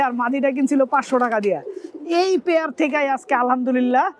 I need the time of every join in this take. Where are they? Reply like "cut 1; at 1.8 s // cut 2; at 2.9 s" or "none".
none